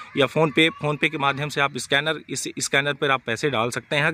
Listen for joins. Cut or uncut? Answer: uncut